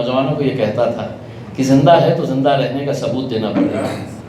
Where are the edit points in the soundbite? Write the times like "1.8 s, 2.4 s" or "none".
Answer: none

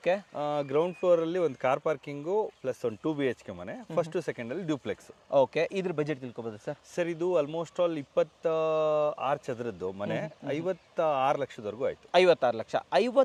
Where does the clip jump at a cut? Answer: none

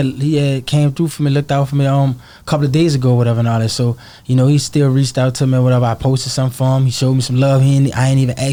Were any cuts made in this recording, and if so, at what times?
none

